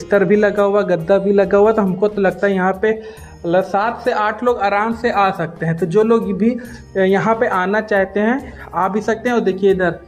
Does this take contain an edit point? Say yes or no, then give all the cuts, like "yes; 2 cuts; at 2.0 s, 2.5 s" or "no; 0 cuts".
no; 0 cuts